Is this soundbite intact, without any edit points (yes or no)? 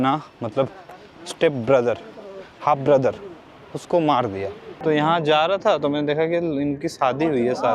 no